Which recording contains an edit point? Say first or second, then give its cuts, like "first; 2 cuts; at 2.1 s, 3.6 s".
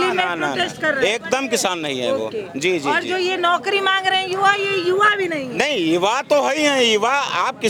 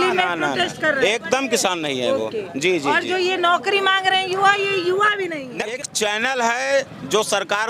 second; 1 cut; at 5.7 s